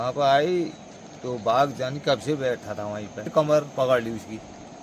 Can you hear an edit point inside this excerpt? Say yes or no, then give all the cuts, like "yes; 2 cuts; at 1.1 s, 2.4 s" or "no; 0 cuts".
yes; 1 cut; at 3.3 s